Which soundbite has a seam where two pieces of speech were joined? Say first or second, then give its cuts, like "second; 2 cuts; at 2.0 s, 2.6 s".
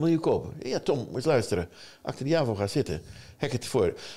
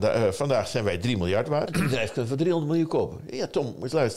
second; 1 cut; at 1.7 s